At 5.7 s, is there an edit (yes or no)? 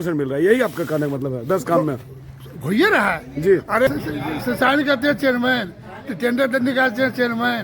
no